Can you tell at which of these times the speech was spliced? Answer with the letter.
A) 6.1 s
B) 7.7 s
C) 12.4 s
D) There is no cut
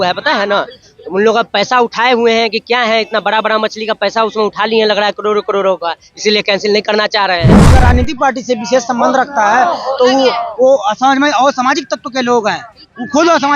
B